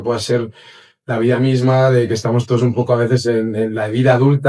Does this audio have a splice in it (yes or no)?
no